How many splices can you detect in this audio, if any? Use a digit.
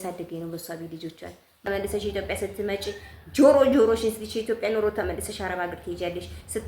1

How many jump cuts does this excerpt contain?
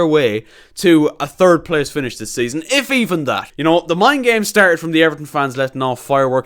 1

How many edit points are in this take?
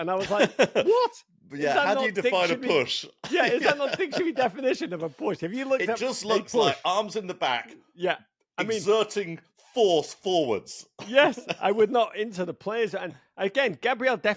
0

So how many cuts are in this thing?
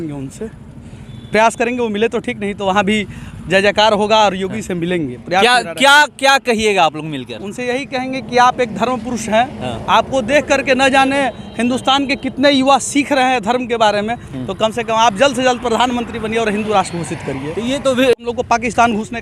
1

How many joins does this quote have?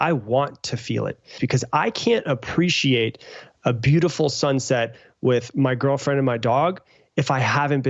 1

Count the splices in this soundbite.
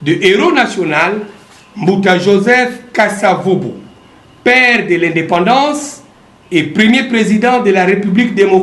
0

